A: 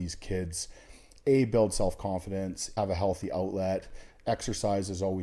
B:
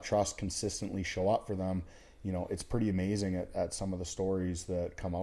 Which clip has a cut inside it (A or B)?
A